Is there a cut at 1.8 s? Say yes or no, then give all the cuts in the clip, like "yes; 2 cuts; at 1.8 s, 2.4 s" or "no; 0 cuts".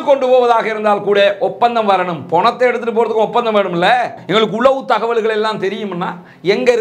no; 1 cut; at 4.2 s